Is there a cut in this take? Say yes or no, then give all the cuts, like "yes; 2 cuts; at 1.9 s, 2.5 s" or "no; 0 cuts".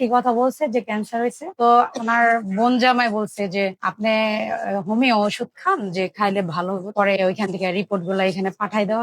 yes; 2 cuts; at 1.4 s, 6.9 s